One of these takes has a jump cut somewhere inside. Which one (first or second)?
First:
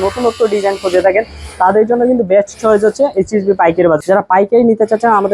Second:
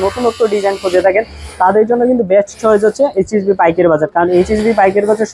first